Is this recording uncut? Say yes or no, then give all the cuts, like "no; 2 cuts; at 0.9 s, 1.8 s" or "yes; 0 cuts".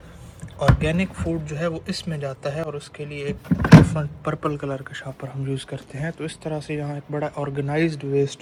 yes; 0 cuts